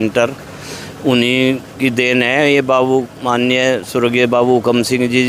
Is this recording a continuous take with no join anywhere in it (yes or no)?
yes